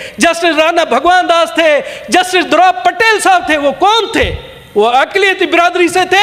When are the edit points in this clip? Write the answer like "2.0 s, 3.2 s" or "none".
none